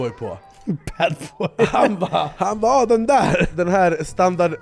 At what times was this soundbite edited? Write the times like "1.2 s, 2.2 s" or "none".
2.3 s, 3.5 s